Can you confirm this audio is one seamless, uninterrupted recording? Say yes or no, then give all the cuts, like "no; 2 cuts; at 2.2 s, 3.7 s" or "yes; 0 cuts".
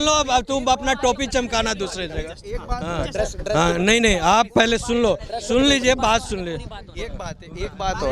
yes; 0 cuts